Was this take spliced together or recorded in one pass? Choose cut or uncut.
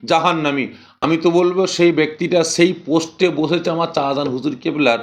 cut